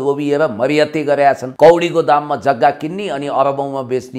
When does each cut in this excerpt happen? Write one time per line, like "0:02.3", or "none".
0:01.5